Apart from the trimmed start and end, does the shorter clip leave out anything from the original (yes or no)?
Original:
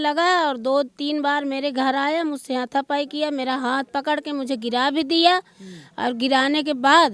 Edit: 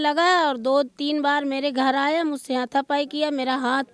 no